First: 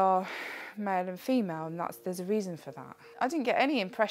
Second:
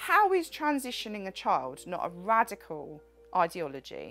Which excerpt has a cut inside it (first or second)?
first